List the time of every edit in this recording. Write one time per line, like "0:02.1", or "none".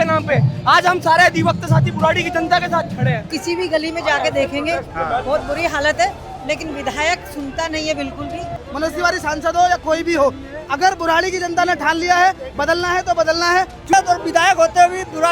0:03.3
0:08.6
0:13.9